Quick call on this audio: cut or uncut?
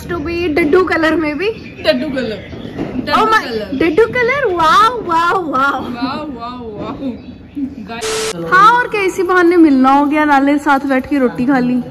cut